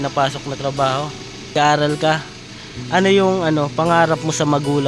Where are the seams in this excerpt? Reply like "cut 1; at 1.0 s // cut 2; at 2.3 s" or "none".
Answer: cut 1; at 1.5 s